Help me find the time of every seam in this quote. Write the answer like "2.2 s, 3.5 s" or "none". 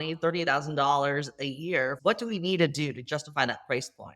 2.0 s